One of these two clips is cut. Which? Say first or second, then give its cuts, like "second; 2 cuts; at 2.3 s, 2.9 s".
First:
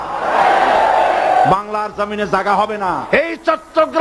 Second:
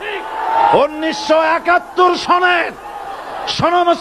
first; 1 cut; at 3.1 s